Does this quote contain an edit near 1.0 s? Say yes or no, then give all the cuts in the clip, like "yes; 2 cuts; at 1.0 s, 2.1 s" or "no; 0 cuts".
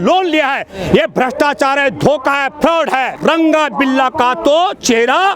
no; 1 cut; at 3.2 s